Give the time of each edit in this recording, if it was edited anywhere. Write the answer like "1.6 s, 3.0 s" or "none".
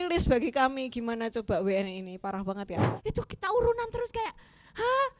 2.8 s